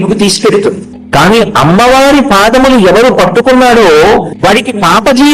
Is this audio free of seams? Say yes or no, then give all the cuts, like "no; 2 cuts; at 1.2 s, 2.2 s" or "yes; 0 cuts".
no; 2 cuts; at 0.9 s, 4.3 s